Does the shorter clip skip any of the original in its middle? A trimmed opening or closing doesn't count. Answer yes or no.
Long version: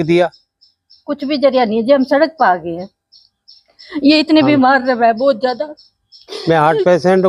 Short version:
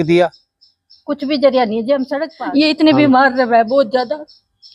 yes